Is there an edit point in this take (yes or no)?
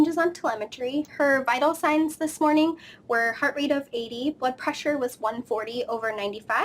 yes